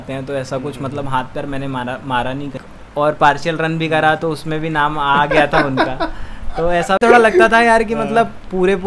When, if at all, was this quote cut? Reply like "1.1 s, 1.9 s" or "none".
2.7 s, 7.0 s